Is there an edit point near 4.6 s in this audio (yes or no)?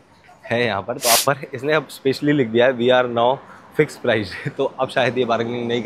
no